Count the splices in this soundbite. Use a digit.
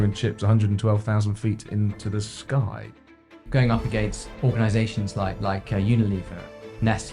2